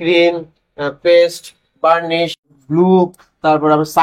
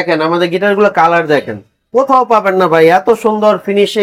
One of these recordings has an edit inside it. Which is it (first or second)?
first